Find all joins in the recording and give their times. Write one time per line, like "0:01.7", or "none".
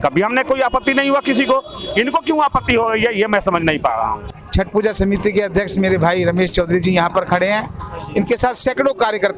0:04.2